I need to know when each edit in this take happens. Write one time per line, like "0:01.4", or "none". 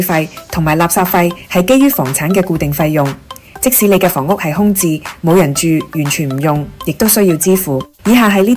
none